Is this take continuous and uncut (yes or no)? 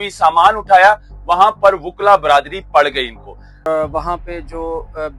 no